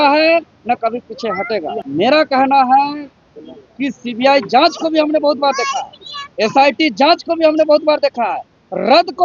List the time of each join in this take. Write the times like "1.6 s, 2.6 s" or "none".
1.8 s